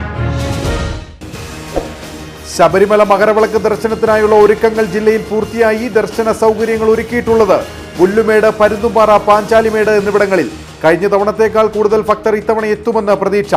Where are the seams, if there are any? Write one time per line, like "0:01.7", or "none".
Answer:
0:01.0